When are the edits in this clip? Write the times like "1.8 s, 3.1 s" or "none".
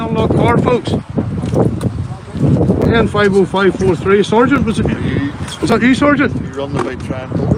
none